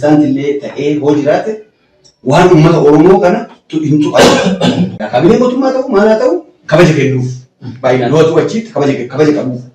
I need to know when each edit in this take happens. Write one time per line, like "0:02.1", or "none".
0:05.0

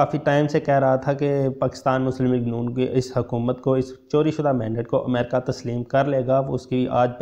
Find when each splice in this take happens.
none

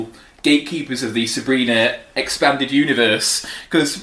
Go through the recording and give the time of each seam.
none

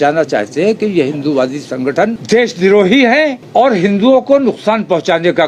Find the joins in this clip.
0:02.2
0:03.4

